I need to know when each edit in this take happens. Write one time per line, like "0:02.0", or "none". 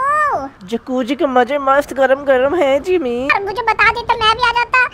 0:03.3